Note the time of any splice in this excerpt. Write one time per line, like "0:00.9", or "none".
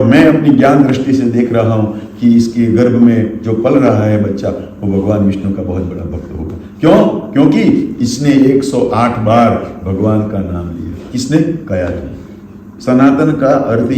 0:12.8